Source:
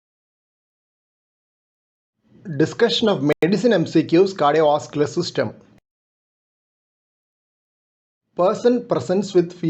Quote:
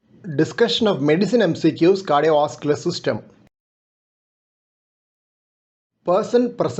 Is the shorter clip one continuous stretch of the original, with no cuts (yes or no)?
no